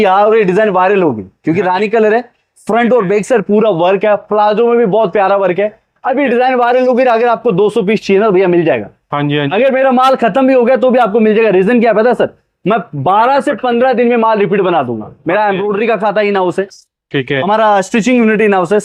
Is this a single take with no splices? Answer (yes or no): yes